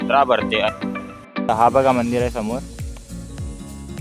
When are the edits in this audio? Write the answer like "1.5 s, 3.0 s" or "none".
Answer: 1.5 s